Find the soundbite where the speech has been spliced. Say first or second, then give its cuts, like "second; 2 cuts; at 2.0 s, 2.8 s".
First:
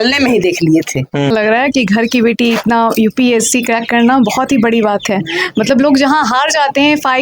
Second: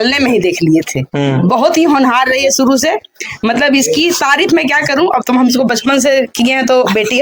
first; 1 cut; at 1.3 s